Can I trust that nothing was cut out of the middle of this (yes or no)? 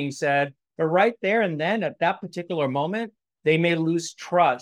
yes